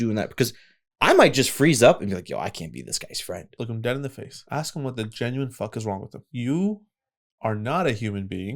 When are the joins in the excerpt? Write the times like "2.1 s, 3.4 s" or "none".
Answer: 3.5 s, 4.3 s, 6.3 s